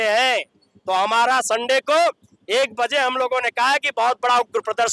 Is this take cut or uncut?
uncut